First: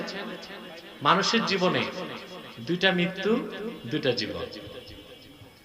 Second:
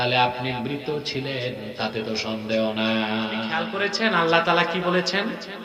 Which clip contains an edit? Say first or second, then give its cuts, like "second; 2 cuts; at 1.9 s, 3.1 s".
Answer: second; 1 cut; at 3.7 s